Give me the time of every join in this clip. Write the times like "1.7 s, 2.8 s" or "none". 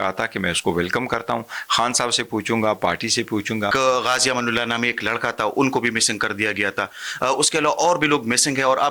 3.7 s